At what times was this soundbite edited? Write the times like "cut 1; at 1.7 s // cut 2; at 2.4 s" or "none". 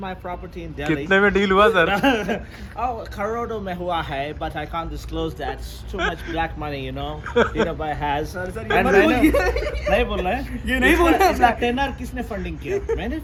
none